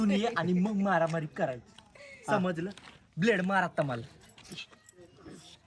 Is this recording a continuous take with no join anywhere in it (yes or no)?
yes